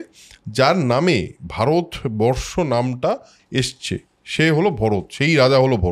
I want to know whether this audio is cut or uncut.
uncut